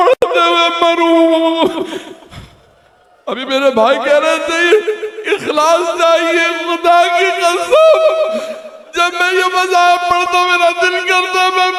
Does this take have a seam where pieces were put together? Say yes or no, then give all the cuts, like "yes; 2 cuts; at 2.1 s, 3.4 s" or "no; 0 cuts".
no; 0 cuts